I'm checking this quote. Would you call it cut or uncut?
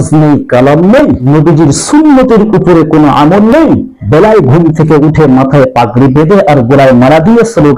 uncut